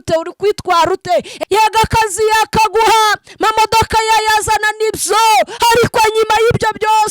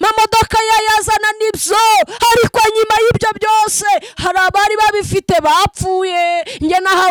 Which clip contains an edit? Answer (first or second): first